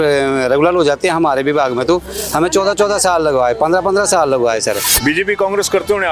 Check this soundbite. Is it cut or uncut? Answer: uncut